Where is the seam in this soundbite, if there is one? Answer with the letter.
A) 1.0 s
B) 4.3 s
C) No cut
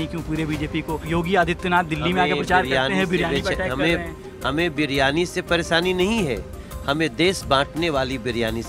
A